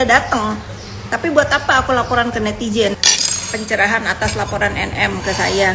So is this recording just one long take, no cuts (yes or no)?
no